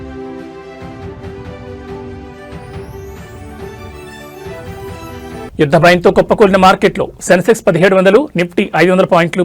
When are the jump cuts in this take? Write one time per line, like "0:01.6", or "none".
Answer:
0:04.0
0:05.5